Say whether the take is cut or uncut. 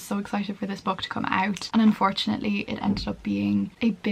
uncut